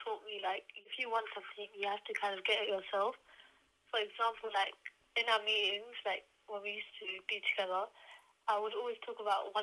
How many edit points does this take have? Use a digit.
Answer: 1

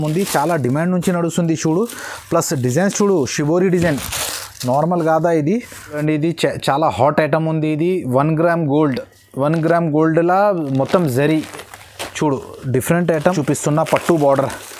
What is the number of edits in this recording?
2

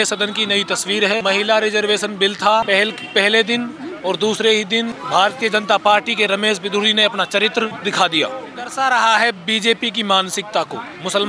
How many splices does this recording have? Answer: 5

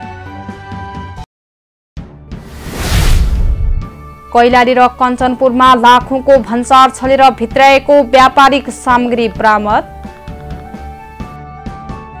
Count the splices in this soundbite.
0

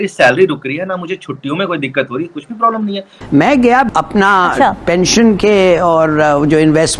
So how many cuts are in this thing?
1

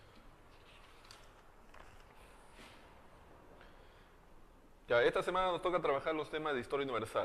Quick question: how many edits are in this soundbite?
0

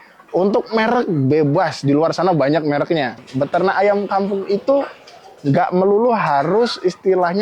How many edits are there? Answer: 1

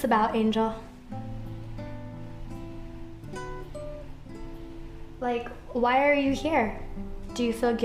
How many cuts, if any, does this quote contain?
1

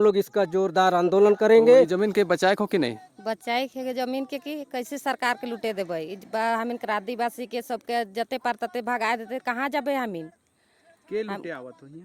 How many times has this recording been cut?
1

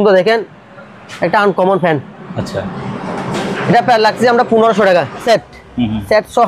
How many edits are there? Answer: 1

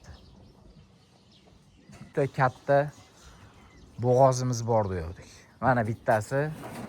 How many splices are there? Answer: 1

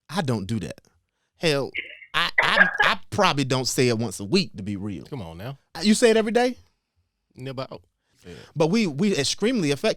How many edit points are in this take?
2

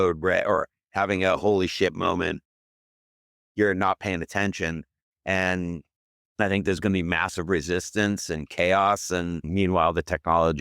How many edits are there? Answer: 1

